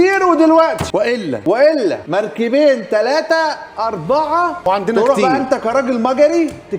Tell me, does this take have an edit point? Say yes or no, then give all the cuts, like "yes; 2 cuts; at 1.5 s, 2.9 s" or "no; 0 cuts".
yes; 2 cuts; at 0.9 s, 2.0 s